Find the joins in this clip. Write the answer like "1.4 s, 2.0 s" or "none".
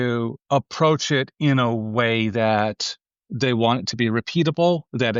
none